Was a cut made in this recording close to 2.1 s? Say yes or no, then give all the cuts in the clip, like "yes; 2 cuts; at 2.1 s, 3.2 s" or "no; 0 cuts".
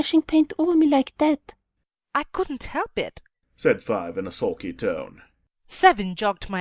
no; 1 cut; at 3.6 s